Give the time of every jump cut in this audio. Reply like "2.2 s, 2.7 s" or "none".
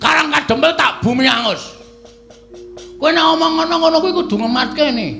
none

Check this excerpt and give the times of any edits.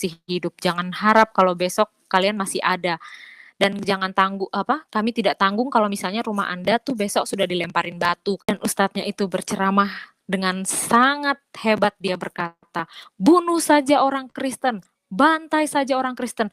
8.5 s

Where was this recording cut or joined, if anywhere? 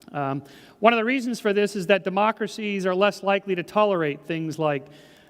4.2 s

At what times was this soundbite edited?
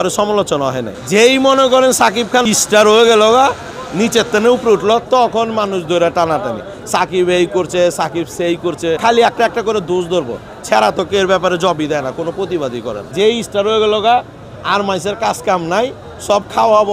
0.9 s, 2.4 s, 9.0 s, 13.1 s

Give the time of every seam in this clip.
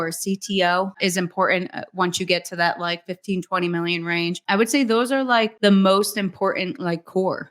1.0 s, 4.4 s, 5.5 s

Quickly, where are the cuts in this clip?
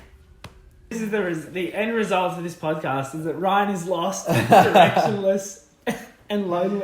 0.9 s

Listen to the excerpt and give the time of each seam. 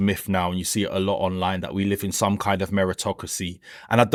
none

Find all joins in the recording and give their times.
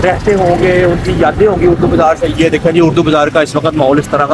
none

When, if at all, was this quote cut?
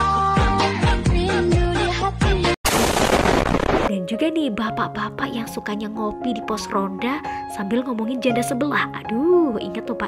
4.0 s

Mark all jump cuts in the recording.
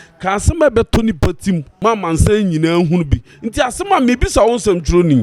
1.7 s

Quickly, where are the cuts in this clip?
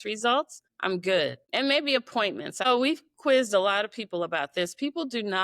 2.6 s

